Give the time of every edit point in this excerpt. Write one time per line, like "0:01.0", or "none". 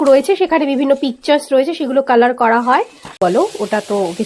0:03.2